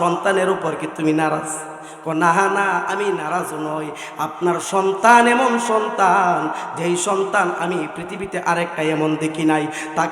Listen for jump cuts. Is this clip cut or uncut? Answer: uncut